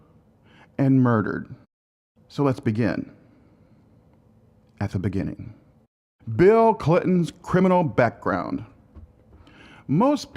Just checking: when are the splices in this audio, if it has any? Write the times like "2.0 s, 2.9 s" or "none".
1.4 s